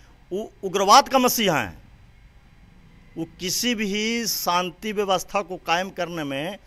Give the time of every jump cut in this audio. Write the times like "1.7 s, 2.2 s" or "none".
none